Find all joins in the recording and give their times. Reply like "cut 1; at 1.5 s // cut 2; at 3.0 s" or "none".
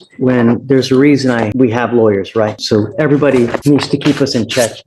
cut 1; at 1.5 s // cut 2; at 2.6 s // cut 3; at 3.6 s